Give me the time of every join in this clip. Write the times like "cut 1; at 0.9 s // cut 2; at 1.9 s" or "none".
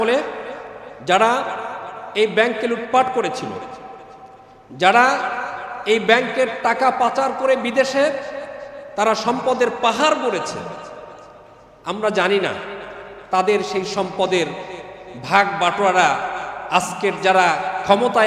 none